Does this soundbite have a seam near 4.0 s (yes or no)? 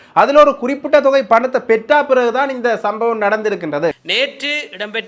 yes